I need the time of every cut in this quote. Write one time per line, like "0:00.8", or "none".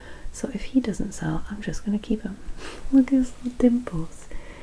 none